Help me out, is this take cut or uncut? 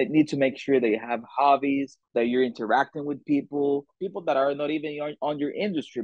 cut